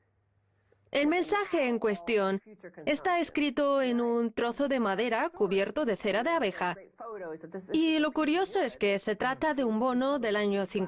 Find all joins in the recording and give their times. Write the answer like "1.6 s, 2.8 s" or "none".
none